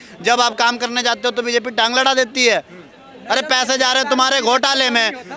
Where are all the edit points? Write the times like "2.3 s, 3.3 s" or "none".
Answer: none